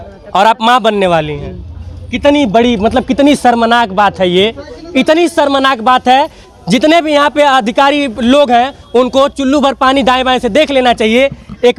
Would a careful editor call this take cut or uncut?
uncut